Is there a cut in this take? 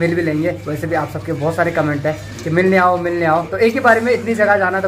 no; 0 cuts

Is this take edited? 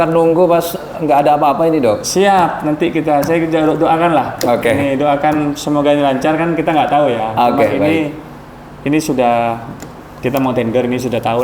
no; 0 cuts

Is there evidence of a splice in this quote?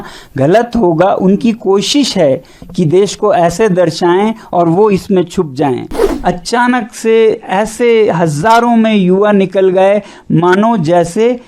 yes; 1 cut; at 6.0 s

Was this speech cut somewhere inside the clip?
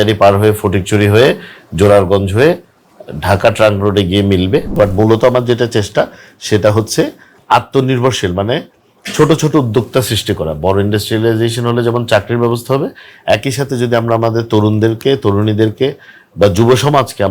yes; 1 cut; at 4.7 s

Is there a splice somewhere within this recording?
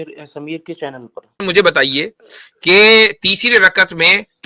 yes; 1 cut; at 1.4 s

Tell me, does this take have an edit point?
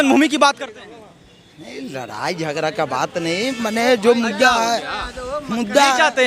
no; 0 cuts

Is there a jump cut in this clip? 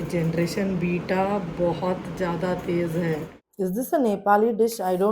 yes; 1 cut; at 3.4 s

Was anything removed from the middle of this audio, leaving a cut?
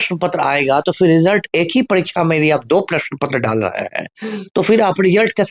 no; 0 cuts

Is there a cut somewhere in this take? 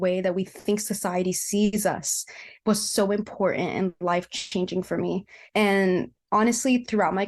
yes; 1 cut; at 5.3 s

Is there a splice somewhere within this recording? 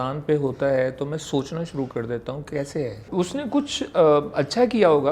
yes; 1 cut; at 3.1 s

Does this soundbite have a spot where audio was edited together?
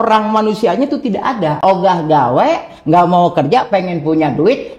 yes; 1 cut; at 1.6 s

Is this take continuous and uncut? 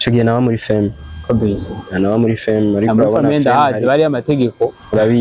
yes; 0 cuts

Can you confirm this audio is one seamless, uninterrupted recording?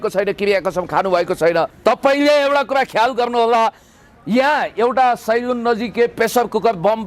no; 1 cut; at 1.7 s

